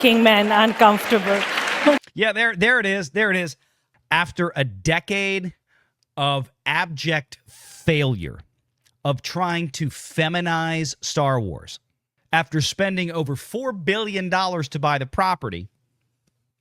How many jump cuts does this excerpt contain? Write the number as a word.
one